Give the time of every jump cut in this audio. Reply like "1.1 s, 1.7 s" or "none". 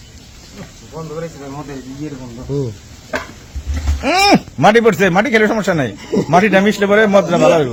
none